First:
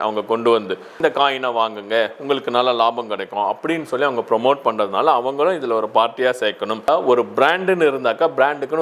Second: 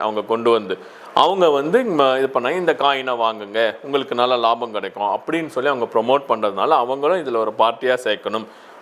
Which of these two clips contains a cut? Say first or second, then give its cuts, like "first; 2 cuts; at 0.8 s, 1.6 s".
first; 2 cuts; at 1.0 s, 6.9 s